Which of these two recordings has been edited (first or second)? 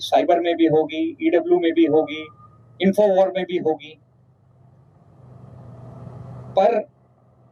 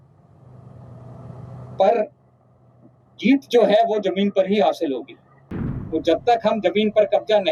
second